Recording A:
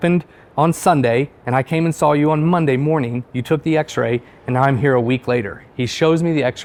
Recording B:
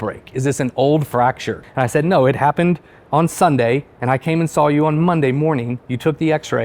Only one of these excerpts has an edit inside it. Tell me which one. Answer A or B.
B